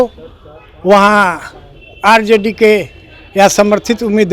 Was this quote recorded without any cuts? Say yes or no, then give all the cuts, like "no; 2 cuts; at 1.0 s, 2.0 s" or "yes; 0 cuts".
yes; 0 cuts